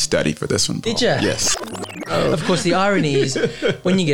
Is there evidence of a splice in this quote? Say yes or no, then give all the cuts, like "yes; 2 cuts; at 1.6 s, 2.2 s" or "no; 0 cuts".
yes; 1 cut; at 1.9 s